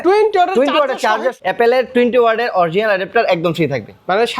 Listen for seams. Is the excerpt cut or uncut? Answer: cut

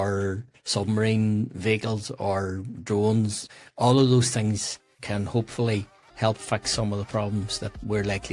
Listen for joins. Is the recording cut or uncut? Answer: cut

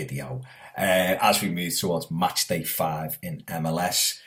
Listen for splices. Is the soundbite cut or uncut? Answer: uncut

